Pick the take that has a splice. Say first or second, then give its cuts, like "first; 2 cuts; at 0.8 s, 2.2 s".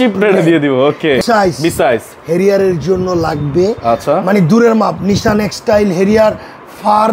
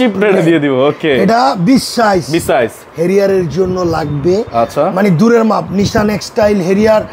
first; 1 cut; at 1.2 s